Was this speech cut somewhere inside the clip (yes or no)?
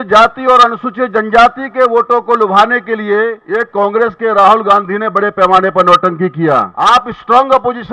yes